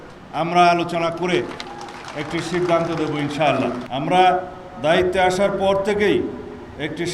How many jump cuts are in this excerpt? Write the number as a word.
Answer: one